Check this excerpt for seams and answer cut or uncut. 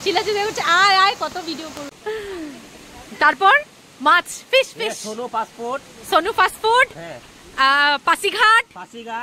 cut